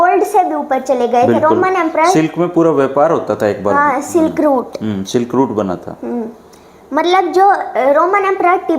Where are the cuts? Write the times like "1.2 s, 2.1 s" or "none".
none